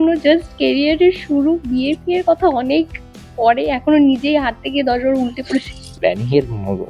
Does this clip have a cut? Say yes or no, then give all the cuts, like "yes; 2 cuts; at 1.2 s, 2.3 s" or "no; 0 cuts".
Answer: yes; 1 cut; at 5.9 s